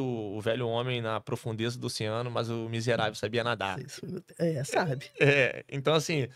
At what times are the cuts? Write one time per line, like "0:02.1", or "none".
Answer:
none